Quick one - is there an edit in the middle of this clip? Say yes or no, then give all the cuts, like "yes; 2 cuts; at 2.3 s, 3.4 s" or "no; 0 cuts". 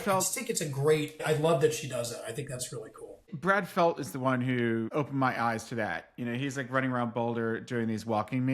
yes; 2 cuts; at 1.2 s, 4.9 s